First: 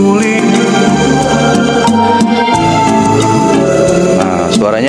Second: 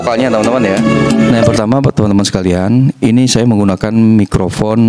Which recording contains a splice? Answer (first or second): second